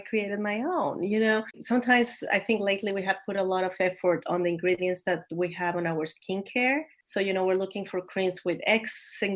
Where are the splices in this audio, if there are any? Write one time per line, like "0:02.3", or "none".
0:01.6
0:07.0